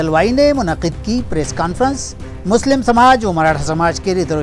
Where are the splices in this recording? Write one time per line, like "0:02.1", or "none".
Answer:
none

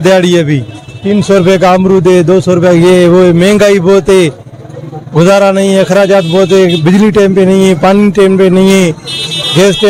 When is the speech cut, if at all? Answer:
none

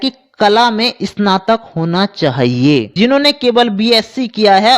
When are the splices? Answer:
0:02.9

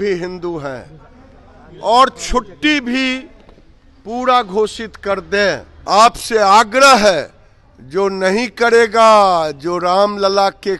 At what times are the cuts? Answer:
0:05.7

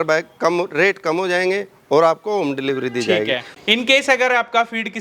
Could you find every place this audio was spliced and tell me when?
0:03.5

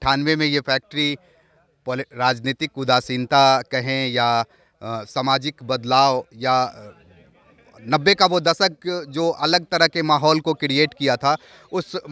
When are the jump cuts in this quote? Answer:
none

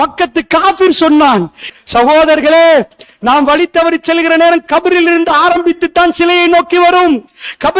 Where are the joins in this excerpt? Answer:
0:01.6
0:03.0

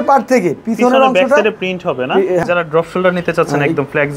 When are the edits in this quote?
0:02.4

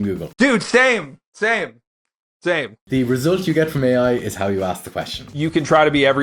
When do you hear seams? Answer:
0:02.8
0:05.3

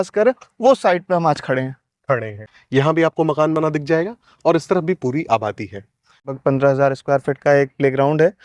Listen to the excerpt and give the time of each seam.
0:02.4
0:06.3

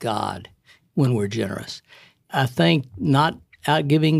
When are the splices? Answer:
0:02.3

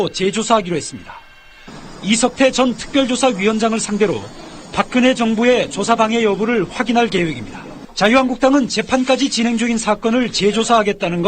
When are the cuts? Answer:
0:04.9

